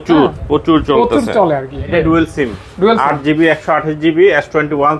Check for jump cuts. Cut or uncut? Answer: cut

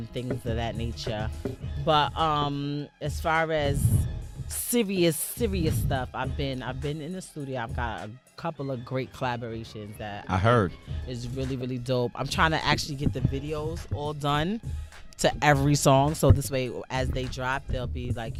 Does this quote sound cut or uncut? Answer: uncut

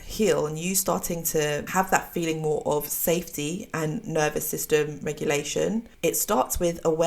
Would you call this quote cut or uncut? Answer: cut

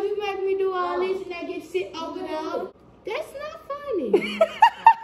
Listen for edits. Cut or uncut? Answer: cut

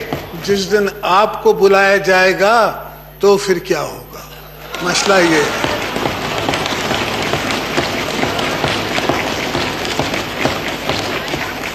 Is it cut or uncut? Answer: uncut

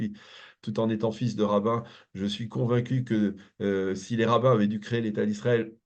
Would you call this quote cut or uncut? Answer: uncut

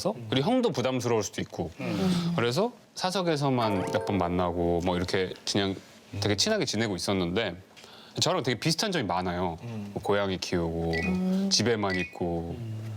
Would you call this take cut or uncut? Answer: uncut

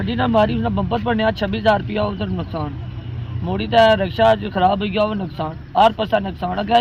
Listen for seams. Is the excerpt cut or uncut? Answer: uncut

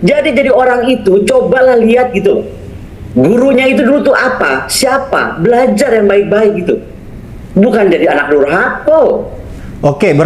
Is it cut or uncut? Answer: uncut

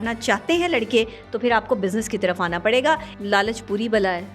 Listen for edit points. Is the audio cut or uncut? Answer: cut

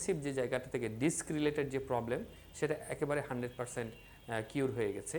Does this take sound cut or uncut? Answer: uncut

